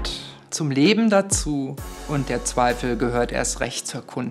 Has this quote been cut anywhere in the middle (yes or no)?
no